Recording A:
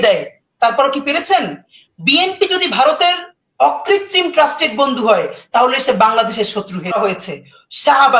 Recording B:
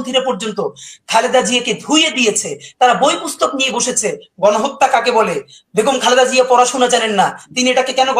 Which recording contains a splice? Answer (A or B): A